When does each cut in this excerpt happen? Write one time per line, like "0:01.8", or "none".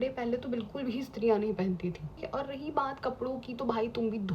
0:02.2